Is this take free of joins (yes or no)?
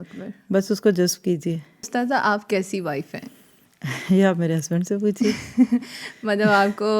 no